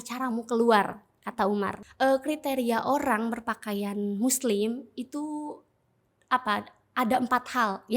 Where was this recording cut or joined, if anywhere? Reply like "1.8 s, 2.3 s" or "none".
1.8 s